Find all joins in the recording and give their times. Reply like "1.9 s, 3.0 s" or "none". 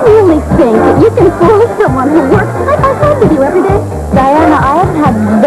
3.0 s

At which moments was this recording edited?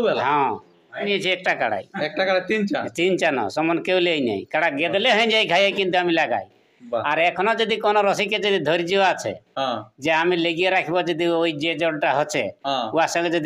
1.1 s

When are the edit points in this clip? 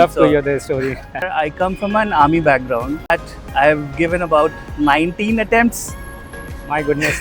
1.4 s, 3.1 s

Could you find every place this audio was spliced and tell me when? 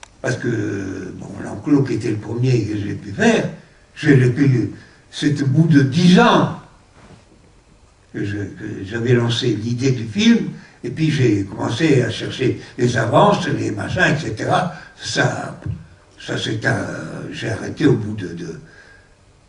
5.6 s

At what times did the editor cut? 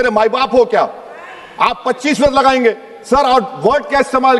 none

